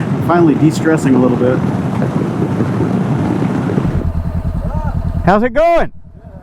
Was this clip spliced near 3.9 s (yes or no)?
yes